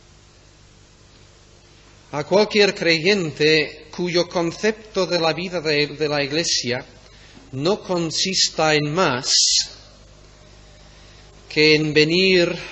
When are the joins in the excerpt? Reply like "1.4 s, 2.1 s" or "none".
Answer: 7.2 s